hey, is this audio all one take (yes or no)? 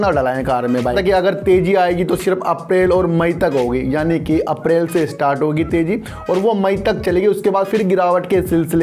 no